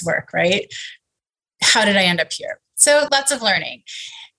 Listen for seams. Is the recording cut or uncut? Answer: cut